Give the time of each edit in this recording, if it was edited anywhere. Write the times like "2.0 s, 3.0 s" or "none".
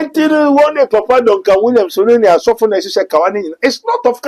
none